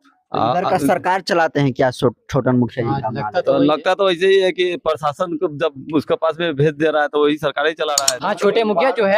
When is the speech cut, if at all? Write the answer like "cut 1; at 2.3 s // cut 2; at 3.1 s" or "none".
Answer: cut 1; at 8.1 s